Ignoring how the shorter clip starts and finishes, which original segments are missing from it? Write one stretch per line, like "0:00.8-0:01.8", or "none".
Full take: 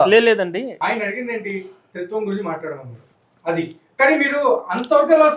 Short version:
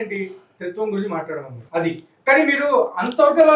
0:02.9-0:03.3